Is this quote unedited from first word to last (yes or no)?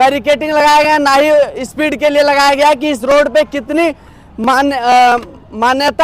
yes